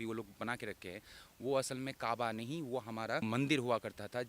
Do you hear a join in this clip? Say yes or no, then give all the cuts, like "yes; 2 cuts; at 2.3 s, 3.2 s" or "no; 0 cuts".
yes; 1 cut; at 3.2 s